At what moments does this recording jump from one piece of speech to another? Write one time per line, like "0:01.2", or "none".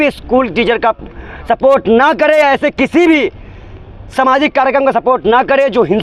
none